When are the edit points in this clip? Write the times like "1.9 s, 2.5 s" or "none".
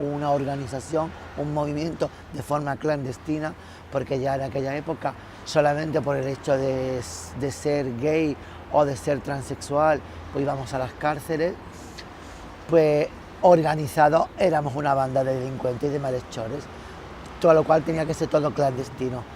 13.8 s